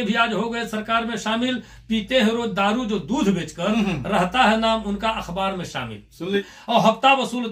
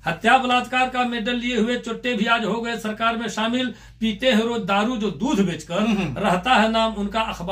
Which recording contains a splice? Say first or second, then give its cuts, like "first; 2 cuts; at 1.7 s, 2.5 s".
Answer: first; 1 cut; at 6.4 s